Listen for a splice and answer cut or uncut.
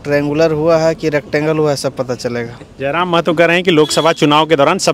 uncut